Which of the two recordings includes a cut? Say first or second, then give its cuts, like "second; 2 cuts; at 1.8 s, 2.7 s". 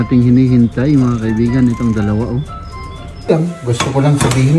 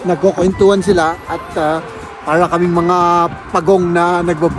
first; 1 cut; at 3.3 s